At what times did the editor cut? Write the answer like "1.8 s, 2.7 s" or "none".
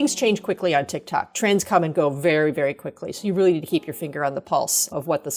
none